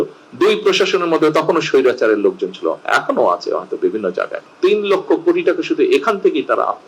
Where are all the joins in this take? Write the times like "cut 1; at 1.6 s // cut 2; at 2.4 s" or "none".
cut 1; at 4.4 s

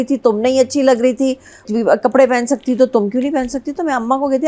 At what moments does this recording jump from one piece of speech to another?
cut 1; at 1.7 s

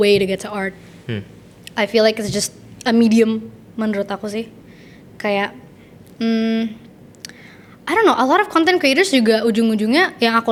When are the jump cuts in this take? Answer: none

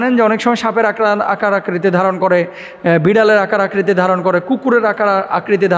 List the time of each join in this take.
none

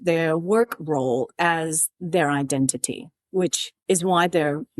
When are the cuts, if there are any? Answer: cut 1; at 3.7 s

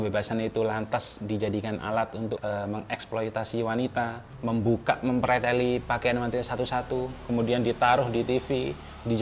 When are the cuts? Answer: cut 1; at 2.4 s // cut 2; at 4.3 s

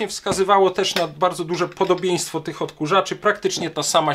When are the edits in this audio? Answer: none

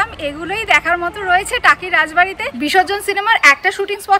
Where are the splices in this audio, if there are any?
cut 1; at 2.4 s

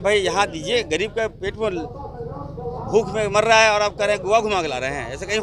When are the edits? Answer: none

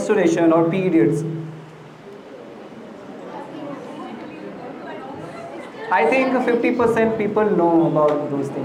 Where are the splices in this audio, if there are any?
none

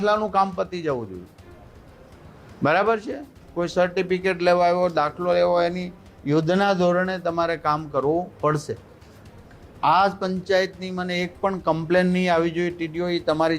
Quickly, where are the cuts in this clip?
none

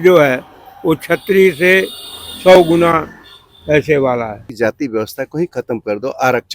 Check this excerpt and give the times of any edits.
cut 1; at 4.5 s

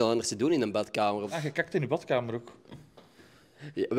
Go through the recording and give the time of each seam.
cut 1; at 1.2 s

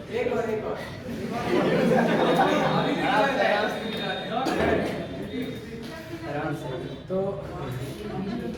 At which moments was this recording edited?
none

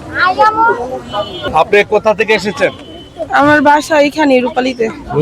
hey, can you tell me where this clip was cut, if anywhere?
cut 1; at 1.4 s

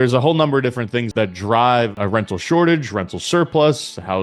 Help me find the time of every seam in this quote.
cut 1; at 1.1 s // cut 2; at 2.0 s

